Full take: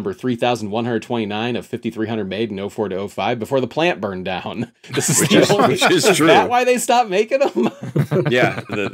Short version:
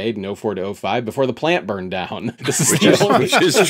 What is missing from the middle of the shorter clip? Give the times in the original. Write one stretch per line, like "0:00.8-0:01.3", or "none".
0:04.7-0:04.8